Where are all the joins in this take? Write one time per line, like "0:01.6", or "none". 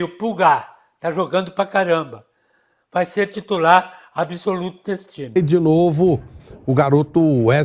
0:05.3

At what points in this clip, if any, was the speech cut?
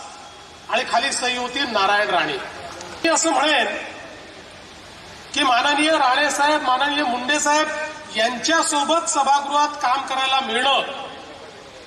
0:03.0

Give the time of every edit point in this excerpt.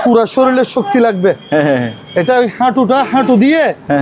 none

